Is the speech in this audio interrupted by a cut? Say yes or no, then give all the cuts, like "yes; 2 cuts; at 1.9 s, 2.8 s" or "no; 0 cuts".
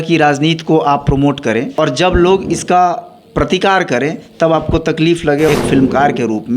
yes; 2 cuts; at 1.7 s, 5.5 s